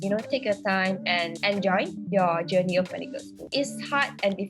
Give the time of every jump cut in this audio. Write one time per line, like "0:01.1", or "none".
0:01.3
0:03.4